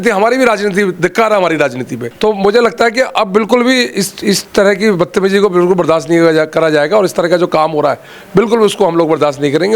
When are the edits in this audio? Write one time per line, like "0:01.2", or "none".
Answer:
0:02.0